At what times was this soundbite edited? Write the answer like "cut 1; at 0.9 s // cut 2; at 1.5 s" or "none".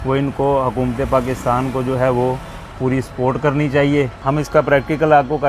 cut 1; at 4.2 s